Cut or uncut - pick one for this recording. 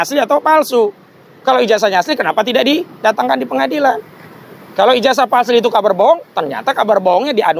uncut